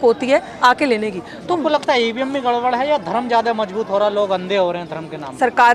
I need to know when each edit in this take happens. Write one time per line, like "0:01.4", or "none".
0:01.6